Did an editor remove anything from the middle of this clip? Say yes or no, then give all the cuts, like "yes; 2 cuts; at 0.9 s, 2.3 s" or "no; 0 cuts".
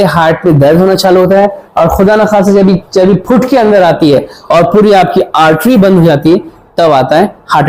no; 0 cuts